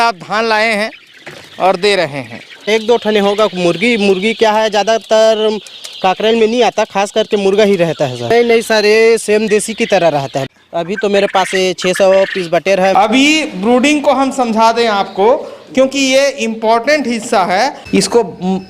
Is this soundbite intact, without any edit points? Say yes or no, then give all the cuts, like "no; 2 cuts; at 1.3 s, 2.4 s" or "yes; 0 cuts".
no; 5 cuts; at 2.7 s, 8.2 s, 10.4 s, 12.9 s, 17.8 s